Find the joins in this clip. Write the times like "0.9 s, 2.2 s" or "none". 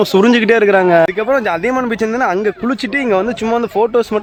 none